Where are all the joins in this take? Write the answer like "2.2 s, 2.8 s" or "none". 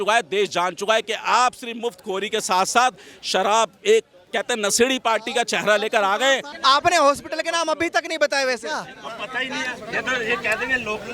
6.4 s